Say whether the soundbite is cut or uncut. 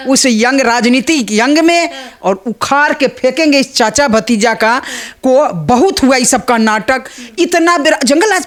uncut